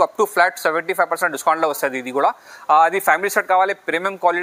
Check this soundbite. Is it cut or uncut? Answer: uncut